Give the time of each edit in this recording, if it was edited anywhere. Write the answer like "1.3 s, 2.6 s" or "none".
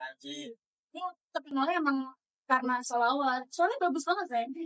none